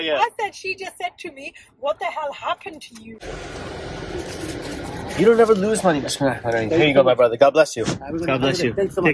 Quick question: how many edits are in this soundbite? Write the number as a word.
one